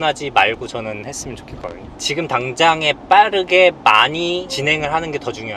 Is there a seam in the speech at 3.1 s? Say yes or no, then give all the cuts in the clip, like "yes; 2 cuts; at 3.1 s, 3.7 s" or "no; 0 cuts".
no; 1 cut; at 1.9 s